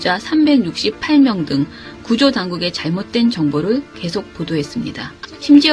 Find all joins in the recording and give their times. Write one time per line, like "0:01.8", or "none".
0:02.3